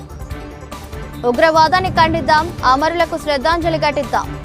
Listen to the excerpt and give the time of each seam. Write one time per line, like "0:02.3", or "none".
0:01.0